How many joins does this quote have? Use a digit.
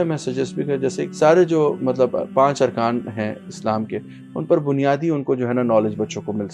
1